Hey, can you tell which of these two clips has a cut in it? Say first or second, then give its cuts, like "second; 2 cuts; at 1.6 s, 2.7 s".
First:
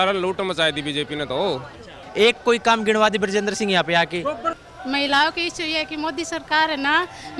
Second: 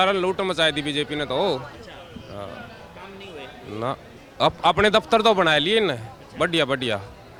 first; 2 cuts; at 2.0 s, 4.6 s